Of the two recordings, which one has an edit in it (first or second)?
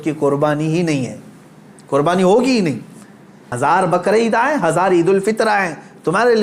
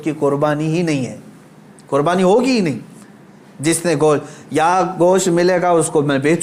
first